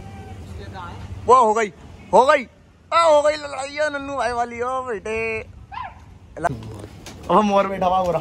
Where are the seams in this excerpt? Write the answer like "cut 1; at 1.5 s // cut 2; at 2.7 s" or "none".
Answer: cut 1; at 6.5 s